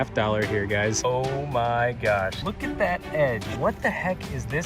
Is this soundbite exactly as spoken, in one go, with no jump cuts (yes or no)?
no